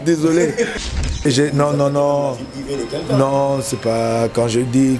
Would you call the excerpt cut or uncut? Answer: cut